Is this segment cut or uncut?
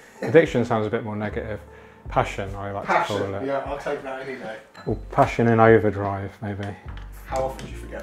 uncut